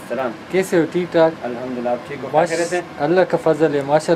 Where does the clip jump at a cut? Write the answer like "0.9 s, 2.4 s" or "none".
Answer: none